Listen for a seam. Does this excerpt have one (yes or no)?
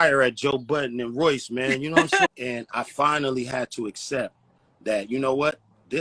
yes